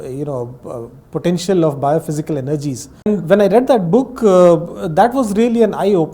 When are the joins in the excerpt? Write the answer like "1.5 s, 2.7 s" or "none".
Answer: 2.9 s